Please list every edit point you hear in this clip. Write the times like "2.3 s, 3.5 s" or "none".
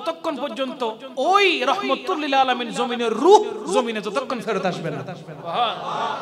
none